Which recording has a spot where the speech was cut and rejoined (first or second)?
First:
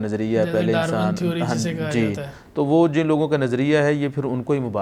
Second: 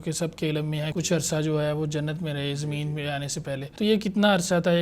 second